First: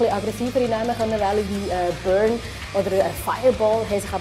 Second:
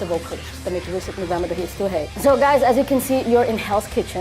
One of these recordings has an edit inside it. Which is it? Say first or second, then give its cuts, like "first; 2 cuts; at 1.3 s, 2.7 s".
second; 1 cut; at 1.7 s